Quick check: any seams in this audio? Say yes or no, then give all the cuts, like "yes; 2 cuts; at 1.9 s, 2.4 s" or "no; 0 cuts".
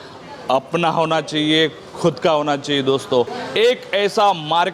yes; 1 cut; at 3.4 s